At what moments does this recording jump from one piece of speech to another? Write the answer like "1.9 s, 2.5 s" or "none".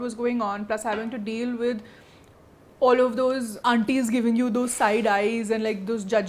none